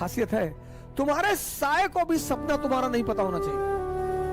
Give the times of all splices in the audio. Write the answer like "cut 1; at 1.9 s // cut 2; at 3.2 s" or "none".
cut 1; at 3.3 s